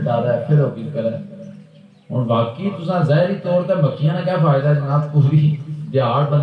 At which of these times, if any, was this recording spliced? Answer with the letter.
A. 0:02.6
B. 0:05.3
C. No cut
C